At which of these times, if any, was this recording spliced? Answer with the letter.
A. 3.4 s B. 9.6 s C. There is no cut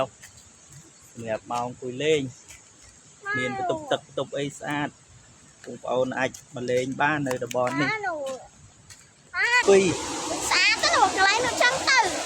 B